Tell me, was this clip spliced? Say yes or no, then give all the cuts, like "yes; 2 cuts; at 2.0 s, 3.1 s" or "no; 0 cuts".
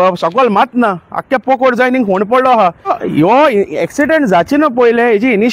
yes; 1 cut; at 2.9 s